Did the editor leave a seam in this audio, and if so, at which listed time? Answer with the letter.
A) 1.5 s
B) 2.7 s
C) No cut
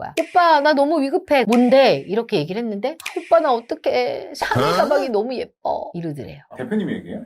A